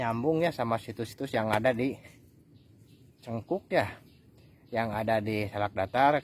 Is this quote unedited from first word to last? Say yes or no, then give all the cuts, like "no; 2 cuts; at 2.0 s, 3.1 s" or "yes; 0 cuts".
yes; 0 cuts